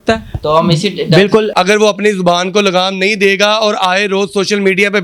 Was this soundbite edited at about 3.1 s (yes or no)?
no